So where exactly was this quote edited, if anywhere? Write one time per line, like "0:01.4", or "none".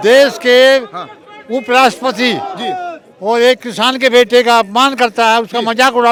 none